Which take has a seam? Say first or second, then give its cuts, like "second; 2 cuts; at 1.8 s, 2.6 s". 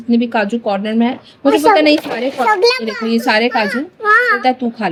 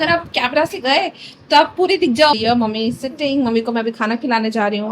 second; 1 cut; at 2.4 s